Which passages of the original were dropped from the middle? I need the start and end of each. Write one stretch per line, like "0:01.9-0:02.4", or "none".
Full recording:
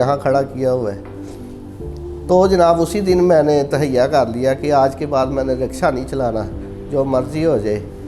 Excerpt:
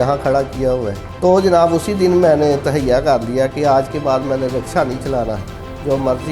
0:01.0-0:02.1